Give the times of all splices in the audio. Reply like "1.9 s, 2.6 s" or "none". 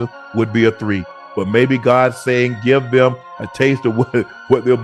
none